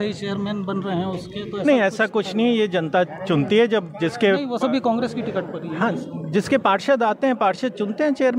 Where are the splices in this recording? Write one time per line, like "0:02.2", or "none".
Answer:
none

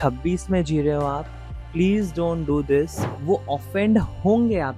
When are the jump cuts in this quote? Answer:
0:03.1

